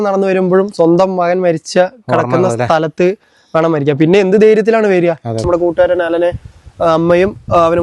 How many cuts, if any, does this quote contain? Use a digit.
1